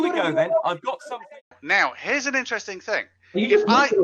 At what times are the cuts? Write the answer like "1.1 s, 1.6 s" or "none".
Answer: 1.4 s